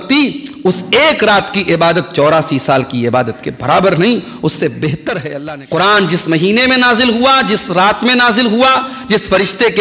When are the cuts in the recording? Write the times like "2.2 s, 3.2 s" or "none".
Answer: 5.3 s

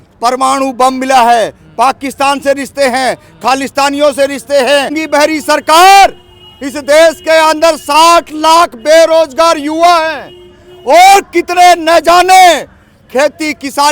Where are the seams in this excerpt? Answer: 5.0 s

